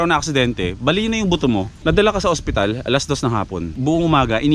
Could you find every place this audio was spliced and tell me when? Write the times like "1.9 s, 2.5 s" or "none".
1.7 s, 3.7 s